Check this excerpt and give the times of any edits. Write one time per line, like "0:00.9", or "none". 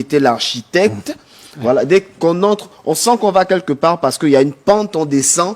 none